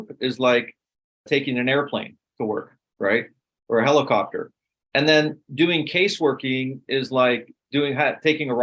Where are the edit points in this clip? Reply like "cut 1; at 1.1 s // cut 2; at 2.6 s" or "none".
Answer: cut 1; at 1.4 s